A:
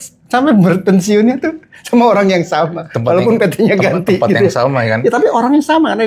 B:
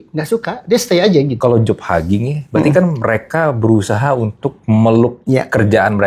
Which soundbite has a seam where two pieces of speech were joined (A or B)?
B